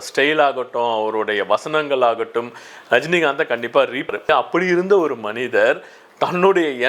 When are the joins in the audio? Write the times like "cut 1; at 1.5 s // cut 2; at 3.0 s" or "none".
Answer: cut 1; at 4.1 s